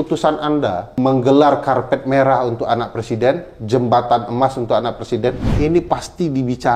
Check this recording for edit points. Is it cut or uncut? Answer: cut